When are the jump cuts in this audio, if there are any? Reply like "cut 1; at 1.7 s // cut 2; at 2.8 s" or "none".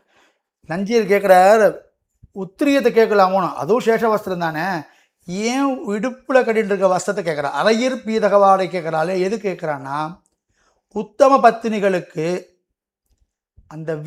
none